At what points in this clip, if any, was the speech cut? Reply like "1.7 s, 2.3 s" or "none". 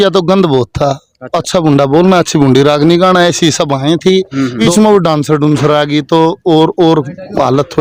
1.3 s, 4.6 s